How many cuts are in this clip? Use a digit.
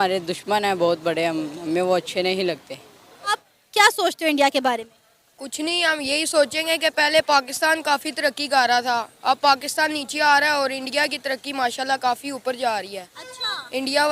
1